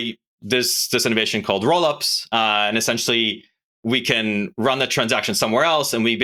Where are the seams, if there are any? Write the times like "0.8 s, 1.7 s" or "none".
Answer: none